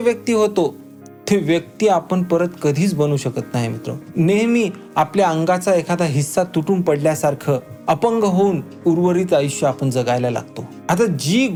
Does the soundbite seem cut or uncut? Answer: uncut